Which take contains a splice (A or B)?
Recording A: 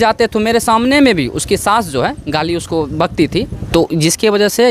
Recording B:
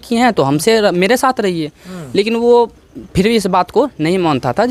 A